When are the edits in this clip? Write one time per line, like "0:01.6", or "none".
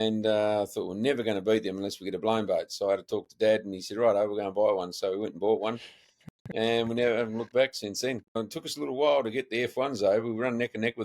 0:08.4